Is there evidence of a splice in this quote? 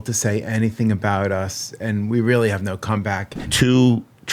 yes; 1 cut; at 3.4 s

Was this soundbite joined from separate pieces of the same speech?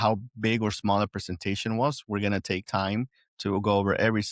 no; 0 cuts

